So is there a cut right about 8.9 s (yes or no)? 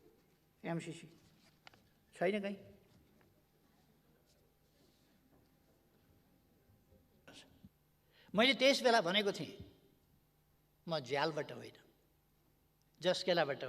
no